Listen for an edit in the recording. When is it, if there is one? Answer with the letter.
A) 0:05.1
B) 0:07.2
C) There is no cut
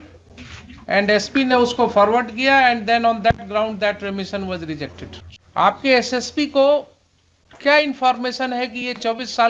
A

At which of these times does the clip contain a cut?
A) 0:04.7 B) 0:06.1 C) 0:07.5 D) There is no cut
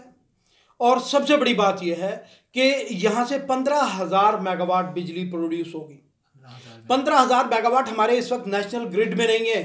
D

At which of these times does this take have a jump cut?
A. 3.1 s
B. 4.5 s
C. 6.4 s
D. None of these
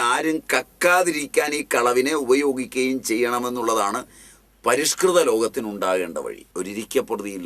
C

